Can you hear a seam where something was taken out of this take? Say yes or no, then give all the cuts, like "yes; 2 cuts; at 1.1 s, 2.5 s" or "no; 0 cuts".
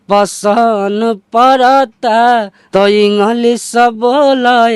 yes; 1 cut; at 2.6 s